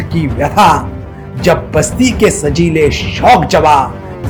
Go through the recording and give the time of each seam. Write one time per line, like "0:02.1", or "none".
none